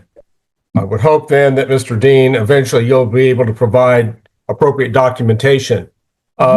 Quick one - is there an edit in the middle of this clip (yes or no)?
no